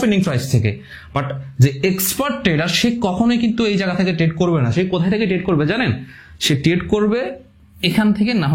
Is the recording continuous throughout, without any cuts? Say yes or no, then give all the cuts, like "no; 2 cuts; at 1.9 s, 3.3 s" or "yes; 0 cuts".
yes; 0 cuts